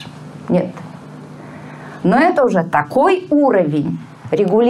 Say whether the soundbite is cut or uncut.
uncut